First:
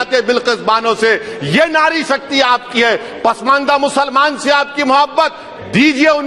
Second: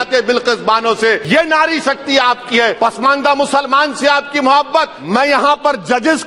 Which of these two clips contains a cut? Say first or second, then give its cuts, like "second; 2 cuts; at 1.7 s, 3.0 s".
second; 3 cuts; at 1.2 s, 2.8 s, 5.0 s